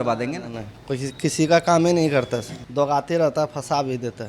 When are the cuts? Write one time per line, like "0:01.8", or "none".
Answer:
0:02.6